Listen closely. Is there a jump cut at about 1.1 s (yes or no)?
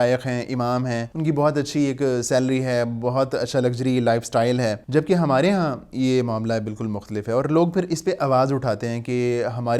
yes